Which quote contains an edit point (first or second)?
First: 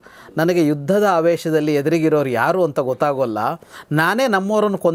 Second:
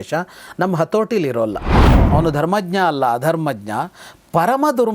second